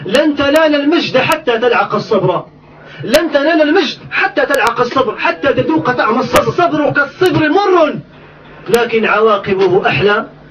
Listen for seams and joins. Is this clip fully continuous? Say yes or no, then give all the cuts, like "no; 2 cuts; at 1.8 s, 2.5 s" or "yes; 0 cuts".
no; 1 cut; at 6.9 s